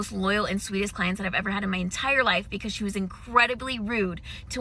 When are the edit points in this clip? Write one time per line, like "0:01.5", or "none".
none